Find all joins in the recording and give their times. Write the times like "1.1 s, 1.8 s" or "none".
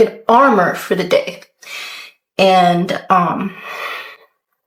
none